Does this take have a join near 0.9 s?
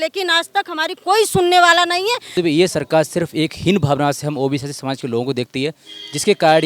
no; 1 cut; at 2.4 s

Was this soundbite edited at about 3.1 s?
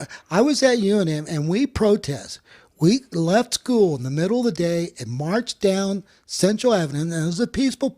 no; 0 cuts

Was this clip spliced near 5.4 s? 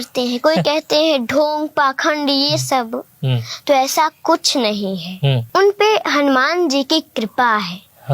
yes; 1 cut; at 5.4 s

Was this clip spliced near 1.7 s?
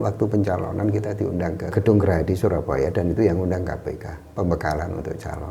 yes; 1 cut; at 1.7 s

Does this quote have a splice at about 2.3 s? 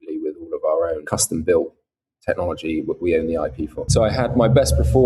no; 2 cuts; at 1.0 s, 3.9 s

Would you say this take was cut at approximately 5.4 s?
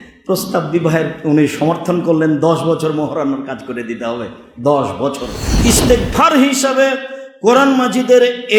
yes; 1 cut; at 5.4 s

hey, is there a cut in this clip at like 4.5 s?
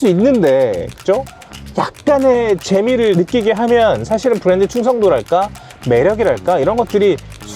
no; 1 cut; at 3.2 s

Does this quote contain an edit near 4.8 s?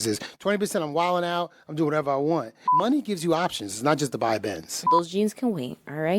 yes; 2 cuts; at 2.6 s, 4.8 s

